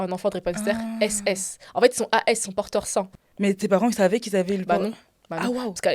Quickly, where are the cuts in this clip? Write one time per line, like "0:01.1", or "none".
0:03.2